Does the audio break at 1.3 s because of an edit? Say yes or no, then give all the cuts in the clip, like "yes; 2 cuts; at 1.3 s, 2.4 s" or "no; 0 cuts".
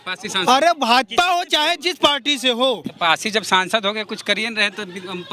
no; 1 cut; at 2.9 s